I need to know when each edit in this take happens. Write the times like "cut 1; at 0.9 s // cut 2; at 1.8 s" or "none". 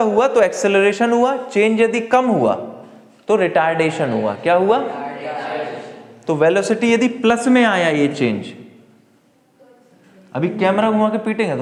none